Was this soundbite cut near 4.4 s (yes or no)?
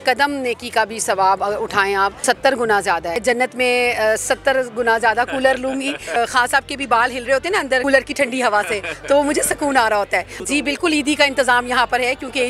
no